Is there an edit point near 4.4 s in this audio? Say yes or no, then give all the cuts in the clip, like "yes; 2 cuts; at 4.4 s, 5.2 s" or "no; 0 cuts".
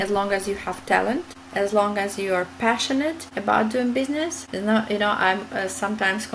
yes; 3 cuts; at 1.4 s, 3.3 s, 4.4 s